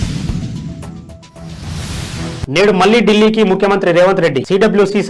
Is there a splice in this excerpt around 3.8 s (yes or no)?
no